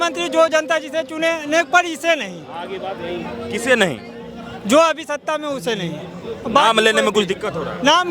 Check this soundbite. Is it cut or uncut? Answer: uncut